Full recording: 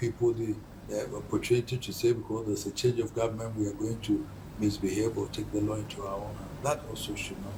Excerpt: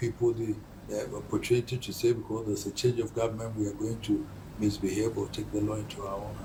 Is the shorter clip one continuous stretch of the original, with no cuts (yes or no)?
yes